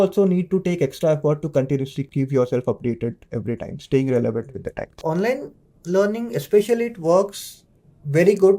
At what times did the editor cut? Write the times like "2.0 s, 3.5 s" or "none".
4.9 s